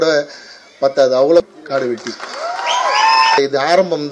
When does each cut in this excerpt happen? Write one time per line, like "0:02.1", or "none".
0:01.4
0:03.4